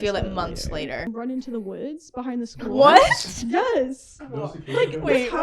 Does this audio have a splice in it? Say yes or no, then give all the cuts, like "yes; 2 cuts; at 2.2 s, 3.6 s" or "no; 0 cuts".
yes; 1 cut; at 1.1 s